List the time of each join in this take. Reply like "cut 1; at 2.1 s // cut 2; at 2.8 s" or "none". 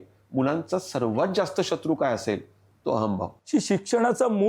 cut 1; at 3.4 s